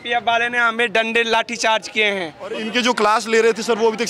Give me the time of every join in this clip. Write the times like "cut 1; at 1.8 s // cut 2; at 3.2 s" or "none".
cut 1; at 2.6 s